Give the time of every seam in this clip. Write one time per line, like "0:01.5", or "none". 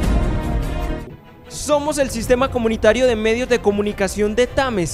0:01.0